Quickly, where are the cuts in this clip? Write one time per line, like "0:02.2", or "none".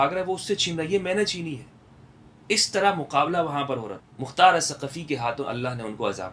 0:04.0